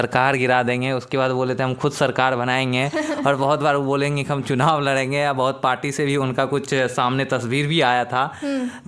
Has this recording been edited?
no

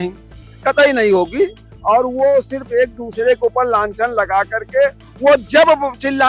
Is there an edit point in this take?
no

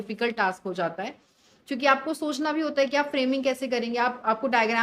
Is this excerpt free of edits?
yes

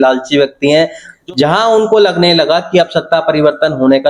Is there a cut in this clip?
yes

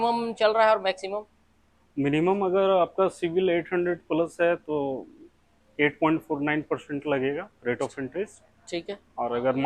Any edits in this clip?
no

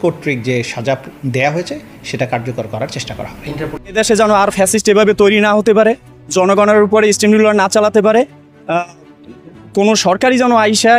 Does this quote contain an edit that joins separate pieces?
yes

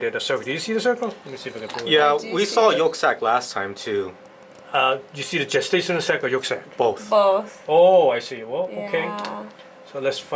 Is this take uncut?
yes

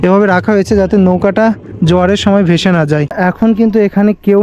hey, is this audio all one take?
yes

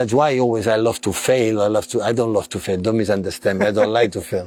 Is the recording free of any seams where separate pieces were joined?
yes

